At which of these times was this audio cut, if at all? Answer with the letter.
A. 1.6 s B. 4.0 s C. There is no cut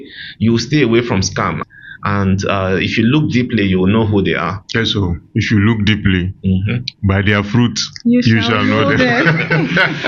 A